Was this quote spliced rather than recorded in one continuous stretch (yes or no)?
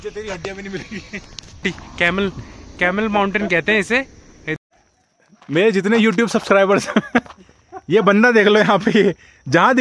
yes